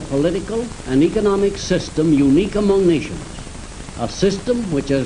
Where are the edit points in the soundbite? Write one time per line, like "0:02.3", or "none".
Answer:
none